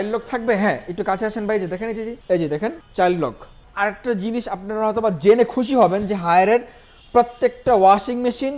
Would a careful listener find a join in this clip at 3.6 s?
yes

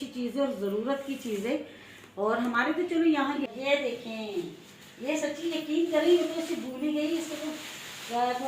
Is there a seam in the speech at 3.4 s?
yes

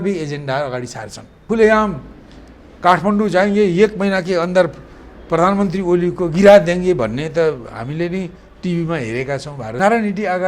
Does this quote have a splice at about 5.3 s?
no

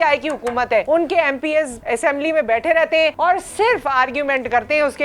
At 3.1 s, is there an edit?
yes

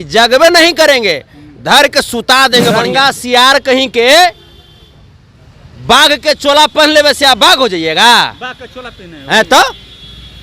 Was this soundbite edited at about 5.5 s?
no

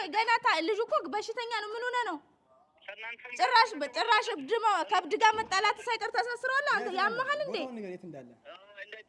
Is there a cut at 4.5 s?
no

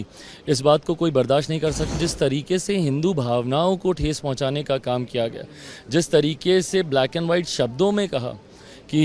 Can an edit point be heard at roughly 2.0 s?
yes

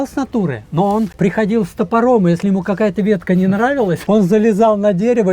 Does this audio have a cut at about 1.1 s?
yes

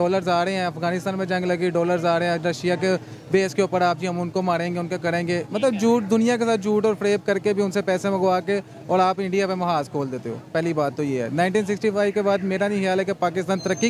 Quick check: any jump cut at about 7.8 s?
no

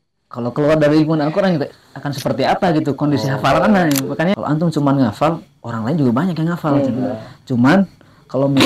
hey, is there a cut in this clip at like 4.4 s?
yes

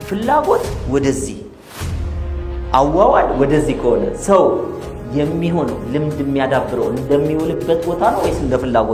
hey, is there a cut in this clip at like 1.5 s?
no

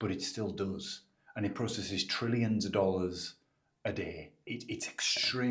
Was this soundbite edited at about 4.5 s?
yes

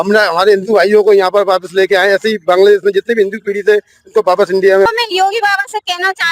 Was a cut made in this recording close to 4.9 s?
yes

